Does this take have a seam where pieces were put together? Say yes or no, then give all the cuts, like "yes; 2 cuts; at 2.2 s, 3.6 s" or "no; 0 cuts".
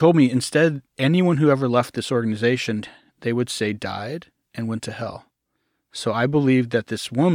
no; 0 cuts